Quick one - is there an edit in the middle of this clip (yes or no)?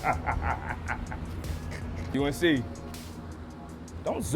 yes